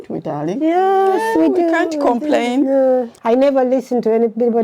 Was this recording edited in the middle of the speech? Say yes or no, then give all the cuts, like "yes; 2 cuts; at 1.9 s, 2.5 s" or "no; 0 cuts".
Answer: yes; 1 cut; at 3.1 s